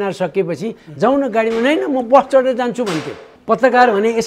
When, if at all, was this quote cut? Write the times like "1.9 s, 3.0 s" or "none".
3.3 s